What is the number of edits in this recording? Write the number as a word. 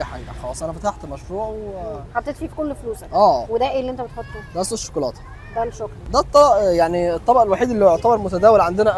two